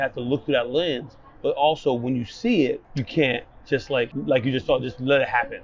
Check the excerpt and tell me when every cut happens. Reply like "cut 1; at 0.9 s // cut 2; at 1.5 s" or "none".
cut 1; at 2.9 s // cut 2; at 4.1 s